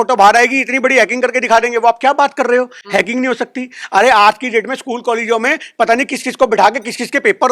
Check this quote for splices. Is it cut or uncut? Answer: uncut